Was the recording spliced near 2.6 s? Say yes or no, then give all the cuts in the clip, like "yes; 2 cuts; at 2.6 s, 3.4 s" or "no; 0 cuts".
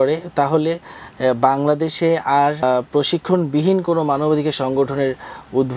yes; 1 cut; at 2.6 s